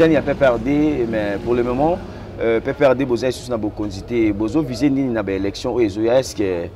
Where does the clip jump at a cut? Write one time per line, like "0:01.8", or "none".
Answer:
none